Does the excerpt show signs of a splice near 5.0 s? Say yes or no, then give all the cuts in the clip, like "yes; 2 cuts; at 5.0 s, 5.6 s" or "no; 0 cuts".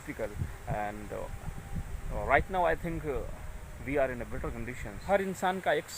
yes; 1 cut; at 5.0 s